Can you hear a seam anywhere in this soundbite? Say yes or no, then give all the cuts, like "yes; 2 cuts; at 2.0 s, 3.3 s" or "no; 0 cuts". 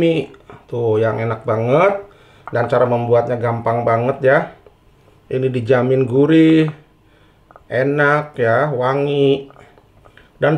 no; 0 cuts